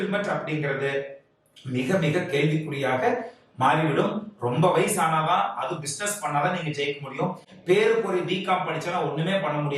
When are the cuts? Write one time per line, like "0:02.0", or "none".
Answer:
none